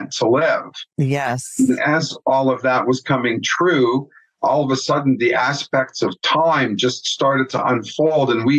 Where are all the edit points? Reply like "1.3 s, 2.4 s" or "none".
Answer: none